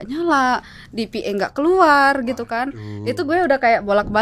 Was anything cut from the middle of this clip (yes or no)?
no